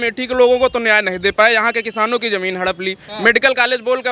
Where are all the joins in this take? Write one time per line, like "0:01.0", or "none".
none